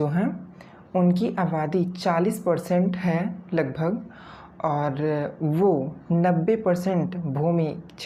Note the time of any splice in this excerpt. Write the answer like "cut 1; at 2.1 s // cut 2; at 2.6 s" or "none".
none